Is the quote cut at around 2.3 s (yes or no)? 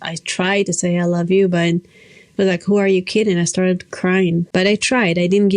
no